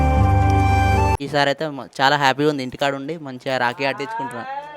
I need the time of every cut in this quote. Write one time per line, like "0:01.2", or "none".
0:01.0